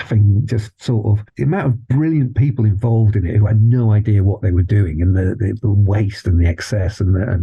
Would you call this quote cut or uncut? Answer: uncut